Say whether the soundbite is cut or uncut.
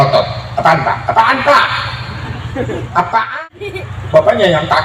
cut